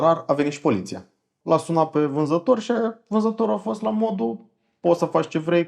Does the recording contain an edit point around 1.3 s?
yes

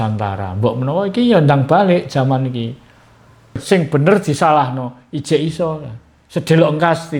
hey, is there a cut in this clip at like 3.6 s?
yes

